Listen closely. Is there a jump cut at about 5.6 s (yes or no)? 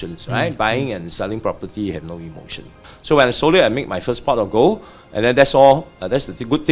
no